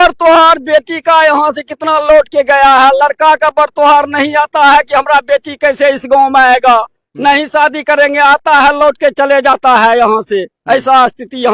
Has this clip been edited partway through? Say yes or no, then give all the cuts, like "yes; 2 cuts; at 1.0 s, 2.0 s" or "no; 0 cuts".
no; 0 cuts